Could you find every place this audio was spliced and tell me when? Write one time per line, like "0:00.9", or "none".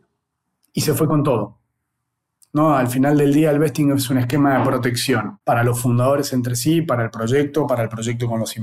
0:05.3